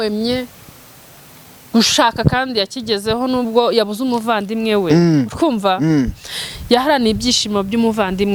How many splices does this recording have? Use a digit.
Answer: 0